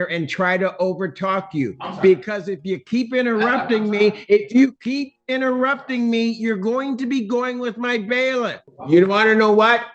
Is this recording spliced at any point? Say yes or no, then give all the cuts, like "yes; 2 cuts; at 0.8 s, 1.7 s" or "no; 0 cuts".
yes; 1 cut; at 8.7 s